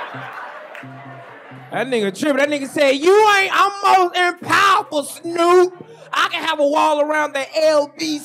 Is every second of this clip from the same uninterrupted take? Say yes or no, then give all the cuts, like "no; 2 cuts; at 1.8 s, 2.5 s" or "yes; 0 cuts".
yes; 0 cuts